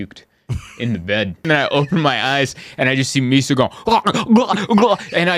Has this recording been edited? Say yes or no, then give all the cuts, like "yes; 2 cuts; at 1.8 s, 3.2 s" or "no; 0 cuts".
yes; 1 cut; at 1.5 s